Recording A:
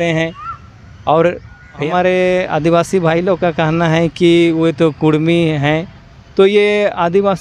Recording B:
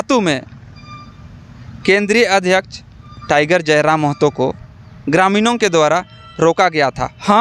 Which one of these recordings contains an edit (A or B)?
A